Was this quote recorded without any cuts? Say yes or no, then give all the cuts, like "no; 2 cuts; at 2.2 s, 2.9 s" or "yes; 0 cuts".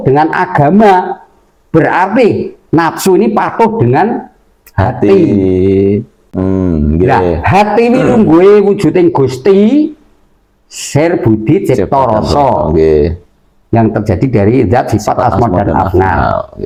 yes; 0 cuts